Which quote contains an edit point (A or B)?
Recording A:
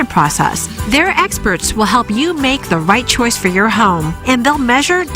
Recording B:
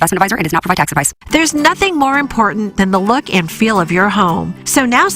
B